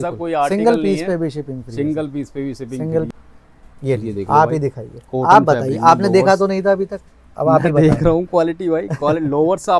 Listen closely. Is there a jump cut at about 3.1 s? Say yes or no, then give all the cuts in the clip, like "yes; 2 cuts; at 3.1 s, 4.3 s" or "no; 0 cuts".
yes; 1 cut; at 3.1 s